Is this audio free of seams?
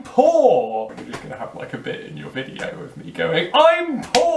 no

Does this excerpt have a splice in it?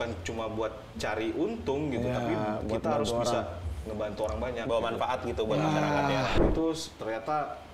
yes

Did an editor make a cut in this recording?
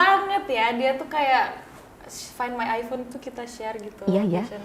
no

